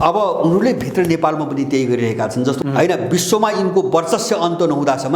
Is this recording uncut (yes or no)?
no